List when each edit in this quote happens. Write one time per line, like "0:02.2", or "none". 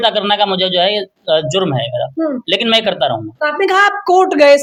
none